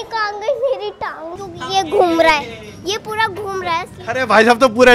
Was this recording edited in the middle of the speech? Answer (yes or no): yes